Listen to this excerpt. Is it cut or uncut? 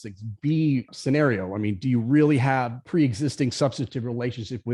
cut